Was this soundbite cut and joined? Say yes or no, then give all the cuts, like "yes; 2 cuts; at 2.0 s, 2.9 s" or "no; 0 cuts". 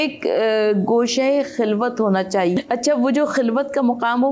yes; 1 cut; at 2.5 s